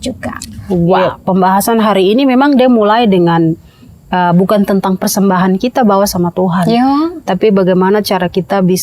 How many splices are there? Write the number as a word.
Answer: one